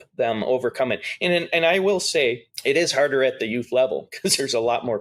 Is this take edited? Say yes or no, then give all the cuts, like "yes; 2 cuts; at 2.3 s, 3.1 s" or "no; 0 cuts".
yes; 1 cut; at 2.5 s